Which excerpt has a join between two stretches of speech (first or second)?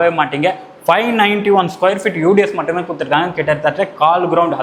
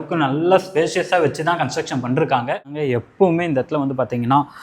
second